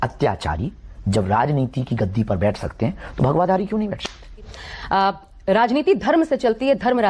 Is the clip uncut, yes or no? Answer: yes